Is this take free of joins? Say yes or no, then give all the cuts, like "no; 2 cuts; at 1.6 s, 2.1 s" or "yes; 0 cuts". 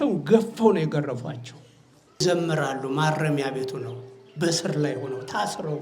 no; 1 cut; at 2.2 s